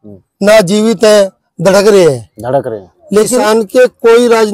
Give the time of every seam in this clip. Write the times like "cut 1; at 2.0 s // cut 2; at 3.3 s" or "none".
cut 1; at 3.4 s